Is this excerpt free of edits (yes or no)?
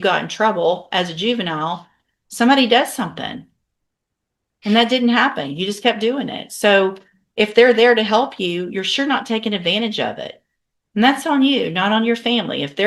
yes